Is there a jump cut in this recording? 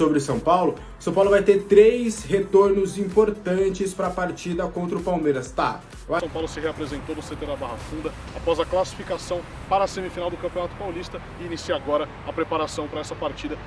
yes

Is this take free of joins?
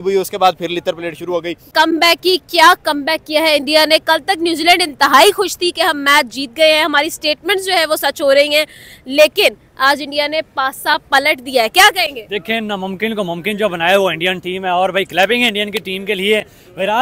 yes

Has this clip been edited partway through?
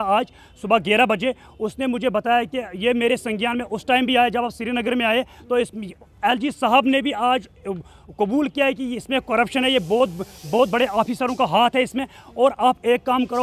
no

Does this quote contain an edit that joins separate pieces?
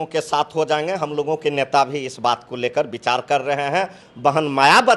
yes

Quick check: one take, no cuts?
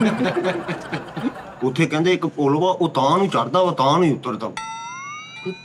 no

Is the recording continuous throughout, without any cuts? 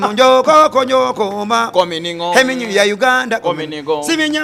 yes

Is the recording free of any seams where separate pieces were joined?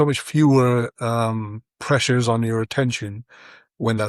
yes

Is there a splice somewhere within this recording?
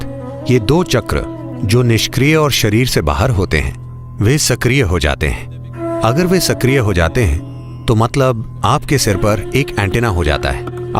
no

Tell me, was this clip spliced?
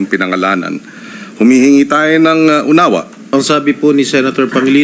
yes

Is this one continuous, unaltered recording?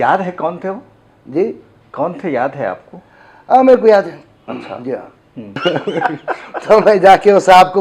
no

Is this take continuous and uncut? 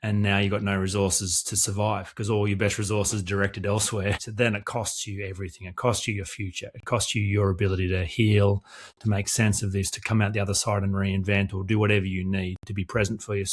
no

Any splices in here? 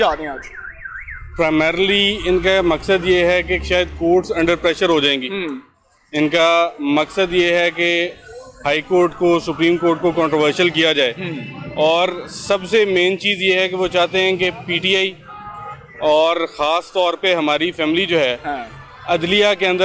no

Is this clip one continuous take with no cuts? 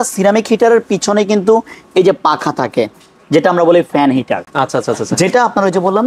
yes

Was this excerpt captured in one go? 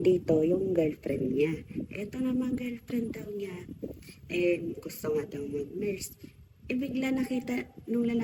yes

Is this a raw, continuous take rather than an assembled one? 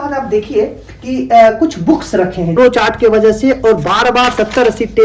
no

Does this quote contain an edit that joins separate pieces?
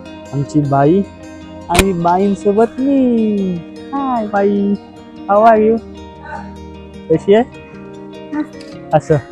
no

